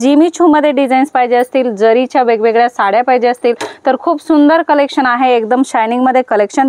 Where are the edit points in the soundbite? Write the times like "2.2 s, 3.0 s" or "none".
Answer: none